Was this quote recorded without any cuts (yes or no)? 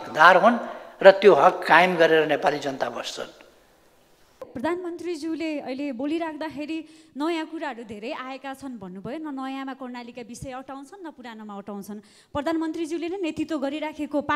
no